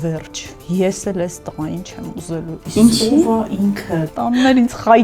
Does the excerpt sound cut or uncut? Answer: cut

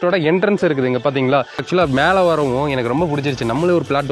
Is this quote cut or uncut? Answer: cut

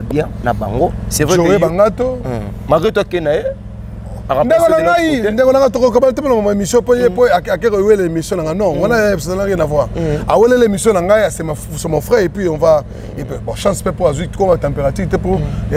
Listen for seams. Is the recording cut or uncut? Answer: uncut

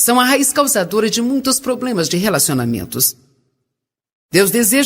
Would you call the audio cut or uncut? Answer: cut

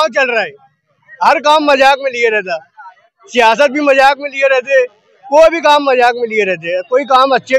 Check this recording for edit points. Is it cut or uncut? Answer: uncut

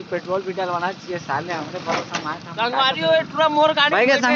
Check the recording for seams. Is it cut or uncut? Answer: uncut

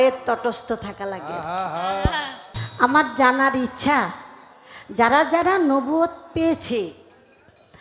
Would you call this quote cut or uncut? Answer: cut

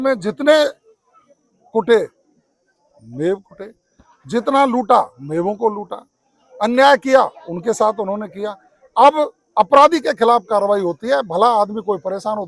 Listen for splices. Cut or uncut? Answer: uncut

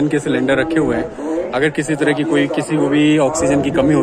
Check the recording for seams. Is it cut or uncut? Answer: uncut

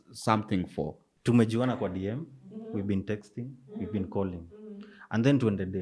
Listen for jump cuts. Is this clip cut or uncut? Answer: cut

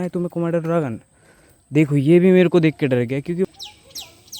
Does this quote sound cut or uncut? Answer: cut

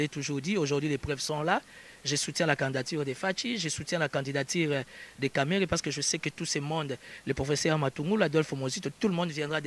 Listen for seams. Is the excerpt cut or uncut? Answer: uncut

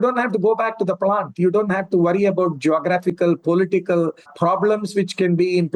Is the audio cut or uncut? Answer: uncut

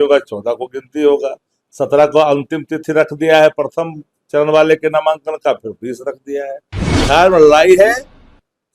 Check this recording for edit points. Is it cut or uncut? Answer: cut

